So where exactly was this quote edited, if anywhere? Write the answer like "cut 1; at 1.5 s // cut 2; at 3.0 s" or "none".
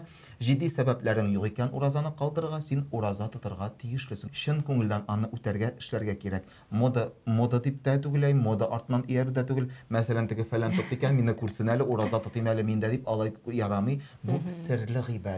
cut 1; at 4.3 s